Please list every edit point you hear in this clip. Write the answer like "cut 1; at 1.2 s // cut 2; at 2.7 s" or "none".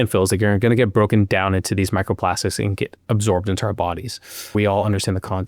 cut 1; at 4.5 s